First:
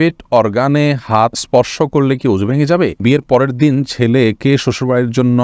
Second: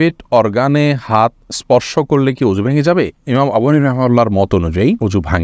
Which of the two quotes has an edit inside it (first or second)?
first